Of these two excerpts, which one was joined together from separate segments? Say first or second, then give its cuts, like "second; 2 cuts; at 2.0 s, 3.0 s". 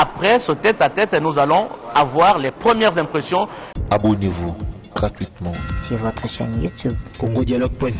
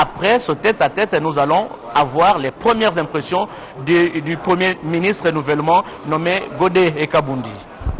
first; 1 cut; at 3.7 s